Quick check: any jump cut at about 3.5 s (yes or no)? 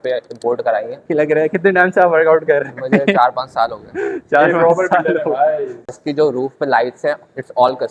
no